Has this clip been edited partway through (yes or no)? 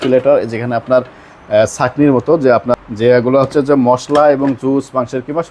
yes